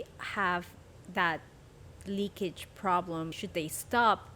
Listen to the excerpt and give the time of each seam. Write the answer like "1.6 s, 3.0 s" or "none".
3.4 s